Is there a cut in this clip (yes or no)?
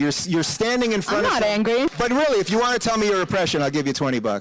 yes